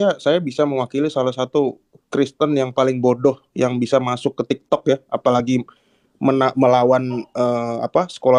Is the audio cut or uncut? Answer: uncut